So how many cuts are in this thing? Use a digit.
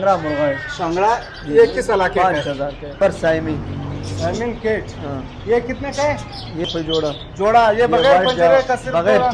2